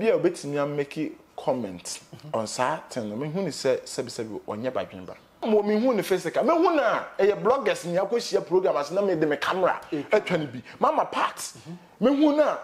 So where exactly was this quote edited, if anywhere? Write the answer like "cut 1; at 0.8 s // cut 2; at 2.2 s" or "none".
cut 1; at 5.4 s